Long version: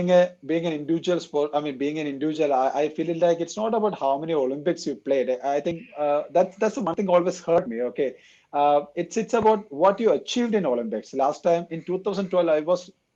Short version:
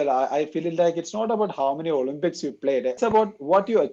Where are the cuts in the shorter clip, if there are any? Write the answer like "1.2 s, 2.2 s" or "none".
3.0 s